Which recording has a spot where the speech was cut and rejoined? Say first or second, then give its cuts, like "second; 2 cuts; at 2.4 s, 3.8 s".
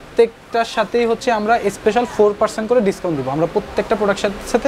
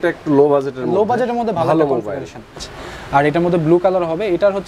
second; 1 cut; at 2.7 s